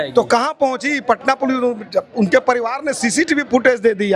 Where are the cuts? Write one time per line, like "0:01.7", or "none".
none